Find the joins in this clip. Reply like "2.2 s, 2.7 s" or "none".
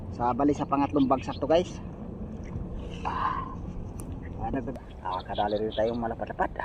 4.7 s